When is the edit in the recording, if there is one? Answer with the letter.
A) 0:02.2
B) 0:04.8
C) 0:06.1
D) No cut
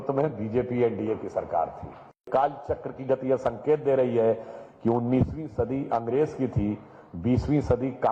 A